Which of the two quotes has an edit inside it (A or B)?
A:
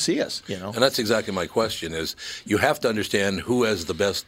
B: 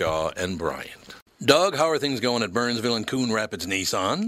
B